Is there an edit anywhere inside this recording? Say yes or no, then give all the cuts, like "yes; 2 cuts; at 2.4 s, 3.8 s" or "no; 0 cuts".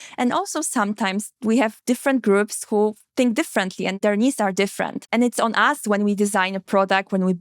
yes; 2 cuts; at 4.0 s, 5.0 s